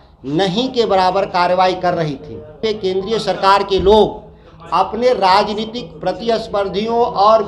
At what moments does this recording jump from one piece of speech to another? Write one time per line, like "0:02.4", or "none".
0:02.6